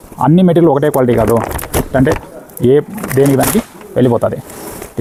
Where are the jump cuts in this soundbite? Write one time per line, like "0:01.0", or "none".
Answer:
none